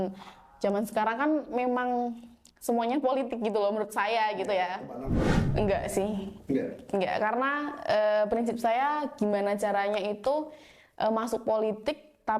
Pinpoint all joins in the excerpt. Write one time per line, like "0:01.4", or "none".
0:05.3